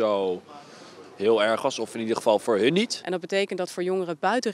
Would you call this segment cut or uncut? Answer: cut